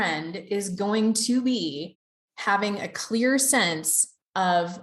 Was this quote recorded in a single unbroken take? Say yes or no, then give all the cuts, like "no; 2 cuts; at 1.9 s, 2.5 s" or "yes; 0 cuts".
yes; 0 cuts